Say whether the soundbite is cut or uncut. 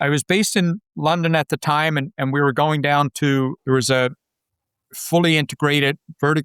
uncut